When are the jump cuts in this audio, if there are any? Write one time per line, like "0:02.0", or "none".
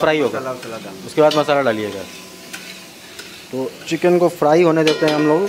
none